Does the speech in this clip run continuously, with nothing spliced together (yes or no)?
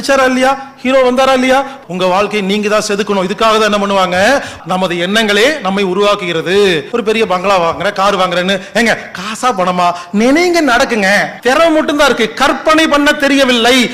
no